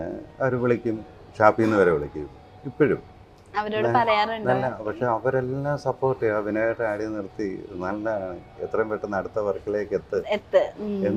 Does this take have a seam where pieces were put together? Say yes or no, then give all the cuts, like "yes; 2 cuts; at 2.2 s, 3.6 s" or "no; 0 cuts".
no; 0 cuts